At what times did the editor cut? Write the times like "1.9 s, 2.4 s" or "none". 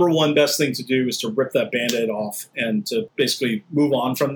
3.1 s